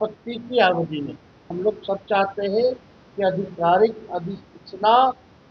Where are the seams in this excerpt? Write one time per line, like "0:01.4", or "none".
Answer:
0:01.5